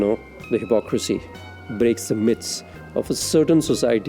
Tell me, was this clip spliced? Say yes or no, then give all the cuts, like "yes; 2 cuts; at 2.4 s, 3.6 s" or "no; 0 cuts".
no; 0 cuts